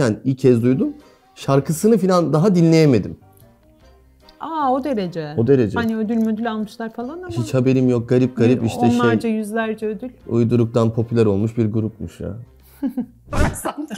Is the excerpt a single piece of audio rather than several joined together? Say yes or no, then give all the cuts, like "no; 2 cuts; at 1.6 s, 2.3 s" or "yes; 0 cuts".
yes; 0 cuts